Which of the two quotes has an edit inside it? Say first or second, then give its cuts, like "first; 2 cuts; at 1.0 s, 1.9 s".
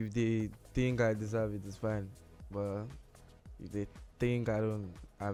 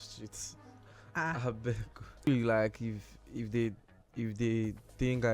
second; 1 cut; at 2.3 s